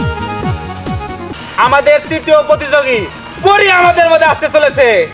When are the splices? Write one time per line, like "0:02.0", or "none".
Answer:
0:01.1